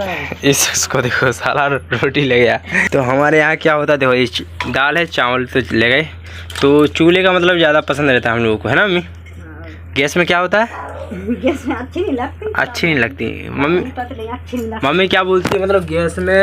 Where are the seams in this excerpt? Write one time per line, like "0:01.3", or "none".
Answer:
0:02.8